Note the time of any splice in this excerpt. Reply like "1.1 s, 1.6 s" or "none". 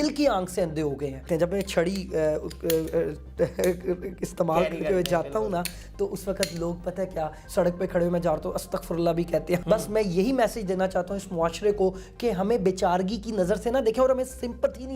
1.2 s, 7.4 s, 9.6 s